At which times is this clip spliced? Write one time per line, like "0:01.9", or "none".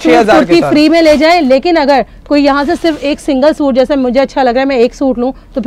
none